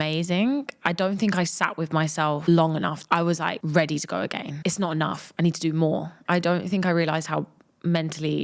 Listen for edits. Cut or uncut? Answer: cut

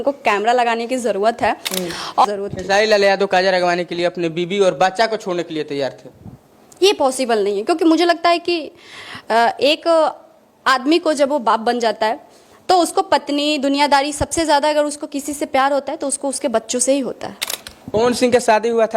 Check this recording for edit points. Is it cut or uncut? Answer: cut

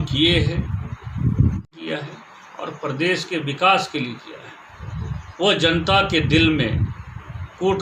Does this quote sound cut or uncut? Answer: cut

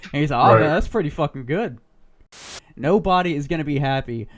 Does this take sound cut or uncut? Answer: cut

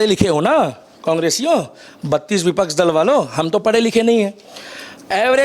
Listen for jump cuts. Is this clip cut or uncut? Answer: uncut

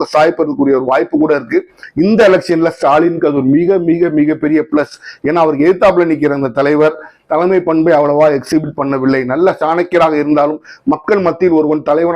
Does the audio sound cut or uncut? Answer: cut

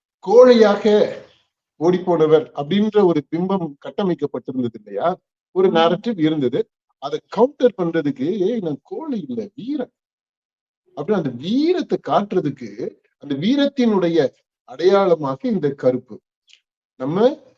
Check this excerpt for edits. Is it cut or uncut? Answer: uncut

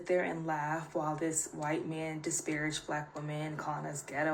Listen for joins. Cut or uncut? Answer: uncut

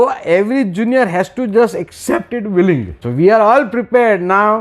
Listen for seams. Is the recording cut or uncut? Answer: cut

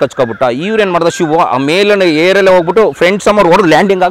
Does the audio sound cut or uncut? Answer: uncut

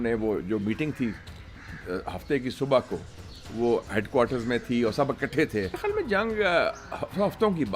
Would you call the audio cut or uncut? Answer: cut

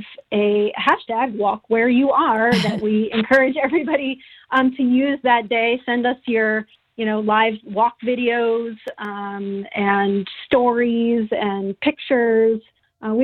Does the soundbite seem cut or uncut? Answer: uncut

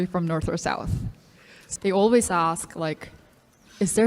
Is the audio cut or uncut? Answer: cut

